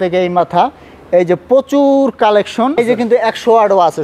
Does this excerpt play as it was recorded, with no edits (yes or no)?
no